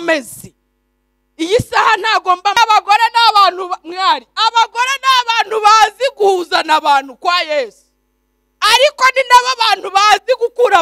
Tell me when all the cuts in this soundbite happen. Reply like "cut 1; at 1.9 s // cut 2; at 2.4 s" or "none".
cut 1; at 2.6 s